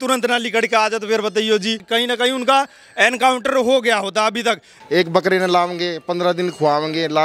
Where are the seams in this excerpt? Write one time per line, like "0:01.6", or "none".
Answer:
0:01.8
0:04.7

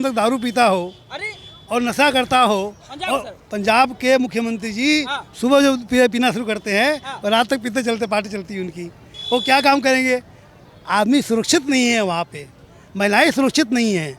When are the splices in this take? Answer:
0:10.7

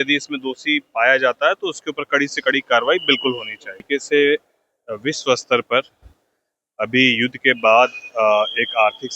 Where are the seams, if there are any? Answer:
0:03.8

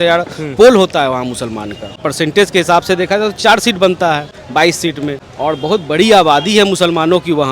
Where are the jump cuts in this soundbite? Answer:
0:02.0
0:04.4
0:05.3

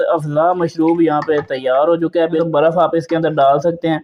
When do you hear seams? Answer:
0:02.4

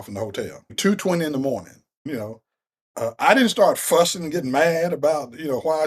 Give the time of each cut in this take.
0:00.8
0:02.0

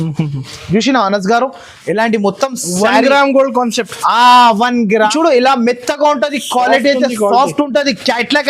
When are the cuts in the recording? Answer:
0:05.1

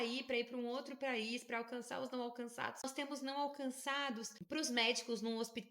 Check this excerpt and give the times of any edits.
0:02.8
0:04.3

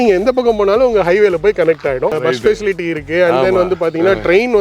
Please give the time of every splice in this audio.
0:02.2

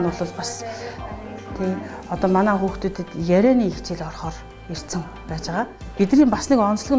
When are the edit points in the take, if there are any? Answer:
0:05.7

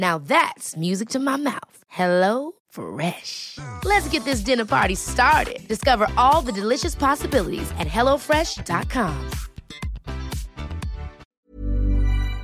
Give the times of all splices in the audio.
0:11.2

